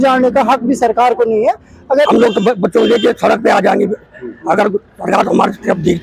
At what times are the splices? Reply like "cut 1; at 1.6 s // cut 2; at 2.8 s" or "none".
cut 1; at 2.1 s